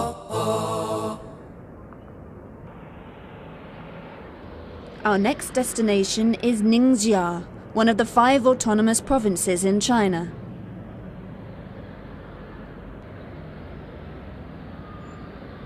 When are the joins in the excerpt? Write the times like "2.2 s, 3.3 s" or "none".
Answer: 14.6 s